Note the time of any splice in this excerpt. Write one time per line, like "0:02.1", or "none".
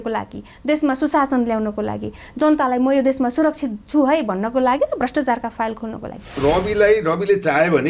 0:06.4